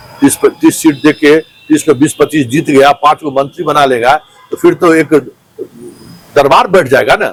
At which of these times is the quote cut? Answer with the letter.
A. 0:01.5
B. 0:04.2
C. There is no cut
C